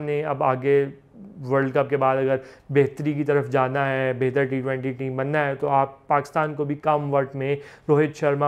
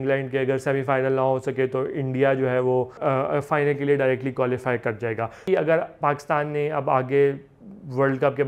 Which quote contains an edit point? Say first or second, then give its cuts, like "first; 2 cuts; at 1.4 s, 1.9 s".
second; 1 cut; at 5.4 s